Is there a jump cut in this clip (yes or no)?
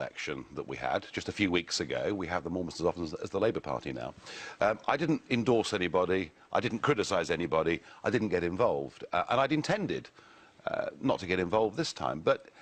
yes